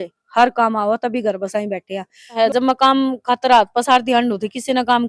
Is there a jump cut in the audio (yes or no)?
yes